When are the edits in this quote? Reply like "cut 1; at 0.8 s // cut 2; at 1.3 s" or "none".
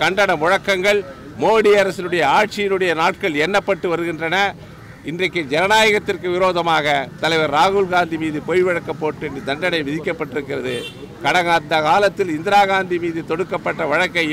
none